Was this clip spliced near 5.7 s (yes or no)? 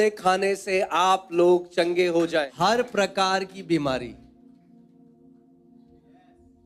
no